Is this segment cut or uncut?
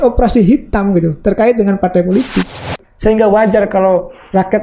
cut